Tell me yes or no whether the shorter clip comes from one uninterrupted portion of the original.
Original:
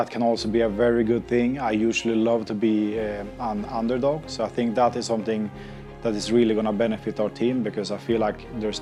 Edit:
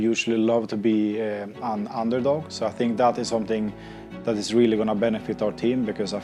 yes